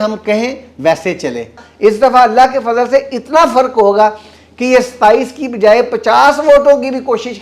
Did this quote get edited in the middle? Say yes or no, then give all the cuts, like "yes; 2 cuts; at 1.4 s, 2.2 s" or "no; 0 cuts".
yes; 1 cut; at 1.6 s